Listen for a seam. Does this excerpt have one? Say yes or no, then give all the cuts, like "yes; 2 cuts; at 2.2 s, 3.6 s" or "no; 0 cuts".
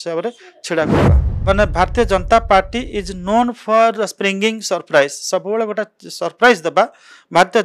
yes; 1 cut; at 1.3 s